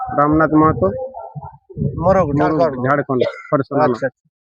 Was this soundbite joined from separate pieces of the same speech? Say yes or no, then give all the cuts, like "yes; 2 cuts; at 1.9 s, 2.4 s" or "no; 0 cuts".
yes; 1 cut; at 2.5 s